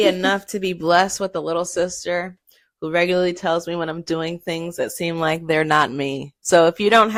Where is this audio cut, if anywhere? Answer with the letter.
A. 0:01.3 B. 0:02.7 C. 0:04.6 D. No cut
D